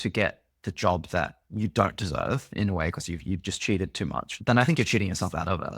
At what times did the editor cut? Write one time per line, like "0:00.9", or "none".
0:01.4
0:04.3